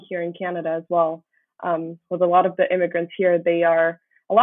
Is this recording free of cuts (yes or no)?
yes